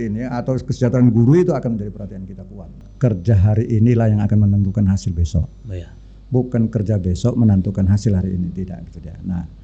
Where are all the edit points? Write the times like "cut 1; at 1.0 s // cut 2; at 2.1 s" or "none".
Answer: cut 1; at 2.8 s